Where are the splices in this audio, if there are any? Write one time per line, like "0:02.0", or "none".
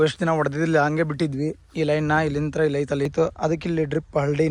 0:03.1